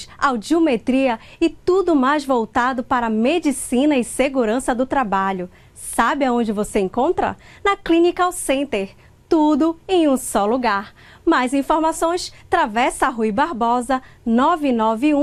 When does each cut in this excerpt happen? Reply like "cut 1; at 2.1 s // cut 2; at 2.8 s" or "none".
none